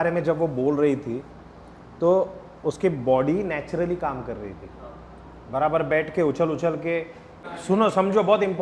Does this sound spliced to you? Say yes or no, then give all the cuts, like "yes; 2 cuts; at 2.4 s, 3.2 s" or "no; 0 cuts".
yes; 1 cut; at 7.5 s